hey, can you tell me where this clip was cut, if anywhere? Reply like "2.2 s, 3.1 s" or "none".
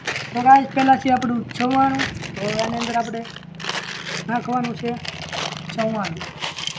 none